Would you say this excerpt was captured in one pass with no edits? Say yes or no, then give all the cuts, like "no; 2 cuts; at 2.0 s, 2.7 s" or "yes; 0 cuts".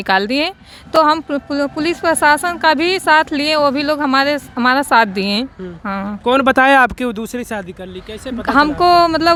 yes; 0 cuts